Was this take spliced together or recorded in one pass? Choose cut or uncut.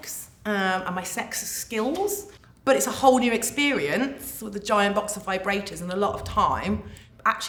uncut